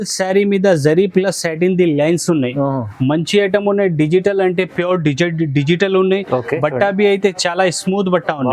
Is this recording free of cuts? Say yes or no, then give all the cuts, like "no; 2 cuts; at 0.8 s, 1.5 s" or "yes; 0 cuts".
yes; 0 cuts